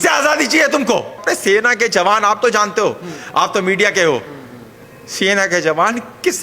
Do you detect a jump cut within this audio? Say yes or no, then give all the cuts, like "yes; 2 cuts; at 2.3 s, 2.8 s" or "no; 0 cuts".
yes; 1 cut; at 1.2 s